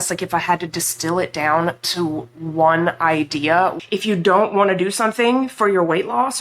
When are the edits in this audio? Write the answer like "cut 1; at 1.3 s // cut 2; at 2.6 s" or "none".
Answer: cut 1; at 3.8 s